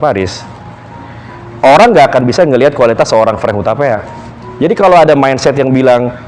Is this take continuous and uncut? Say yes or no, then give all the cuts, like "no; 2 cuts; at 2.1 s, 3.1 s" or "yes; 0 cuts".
no; 1 cut; at 4.1 s